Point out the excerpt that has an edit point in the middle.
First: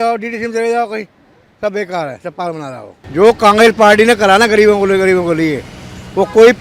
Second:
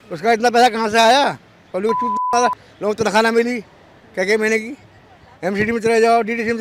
first; 1 cut; at 2.9 s

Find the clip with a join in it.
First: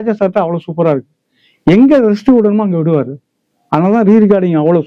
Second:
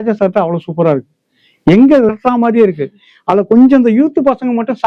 second; 1 cut; at 2.1 s

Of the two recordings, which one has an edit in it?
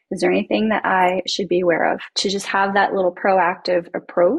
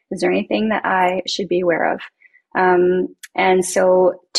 first; 1 cut; at 2.1 s

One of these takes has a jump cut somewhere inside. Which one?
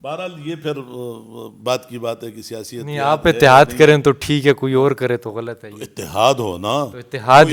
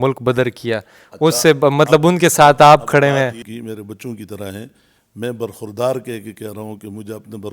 second; 1 cut; at 3.4 s

